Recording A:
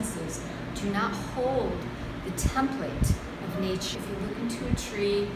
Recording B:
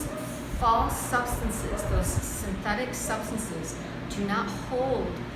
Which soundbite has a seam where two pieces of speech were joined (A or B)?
A